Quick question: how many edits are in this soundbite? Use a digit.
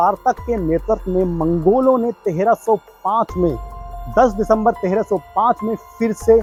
0